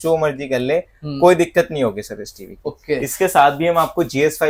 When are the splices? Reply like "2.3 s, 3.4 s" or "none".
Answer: none